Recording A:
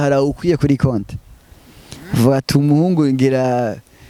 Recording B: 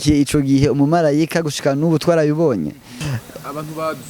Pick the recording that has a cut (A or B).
B